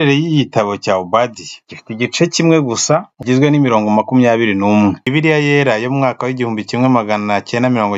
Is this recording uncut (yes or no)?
no